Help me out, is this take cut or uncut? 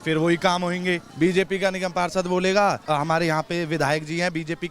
cut